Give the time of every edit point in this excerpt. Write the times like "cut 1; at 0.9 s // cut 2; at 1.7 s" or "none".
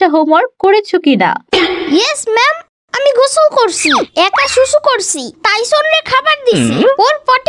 none